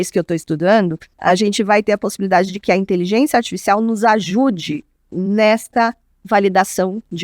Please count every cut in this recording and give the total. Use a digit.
1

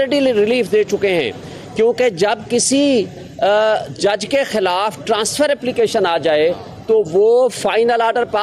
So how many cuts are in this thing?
0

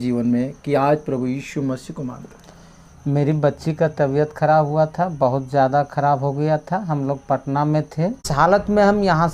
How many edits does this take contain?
1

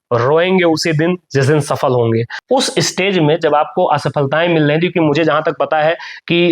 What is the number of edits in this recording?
1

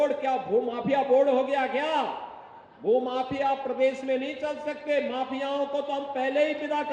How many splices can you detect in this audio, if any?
0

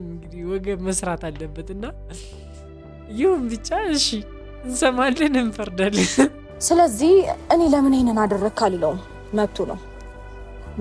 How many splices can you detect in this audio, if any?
1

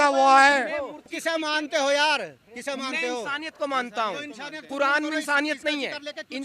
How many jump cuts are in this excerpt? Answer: 1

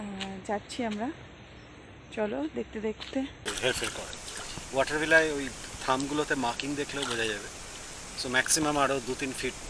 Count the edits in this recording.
1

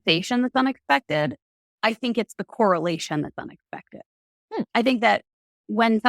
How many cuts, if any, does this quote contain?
0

